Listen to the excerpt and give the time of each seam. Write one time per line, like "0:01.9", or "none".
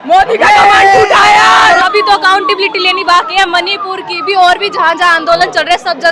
0:01.8